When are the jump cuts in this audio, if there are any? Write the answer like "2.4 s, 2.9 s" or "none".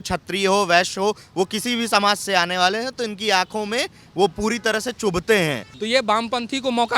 5.7 s